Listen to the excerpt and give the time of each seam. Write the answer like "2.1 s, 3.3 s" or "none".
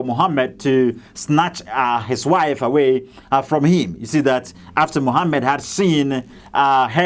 none